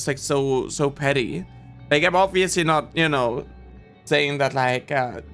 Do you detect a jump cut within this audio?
no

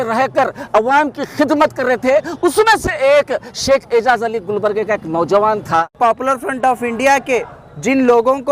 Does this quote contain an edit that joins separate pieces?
yes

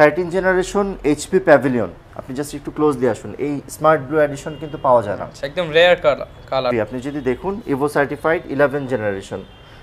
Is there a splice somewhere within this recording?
yes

